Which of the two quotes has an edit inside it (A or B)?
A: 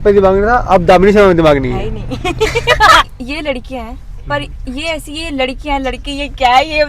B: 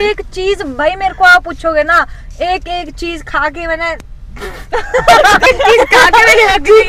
A